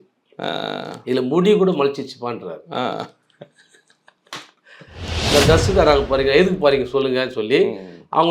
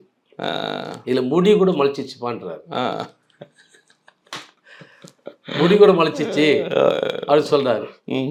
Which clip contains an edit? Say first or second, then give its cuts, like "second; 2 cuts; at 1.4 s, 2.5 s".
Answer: first; 1 cut; at 5.1 s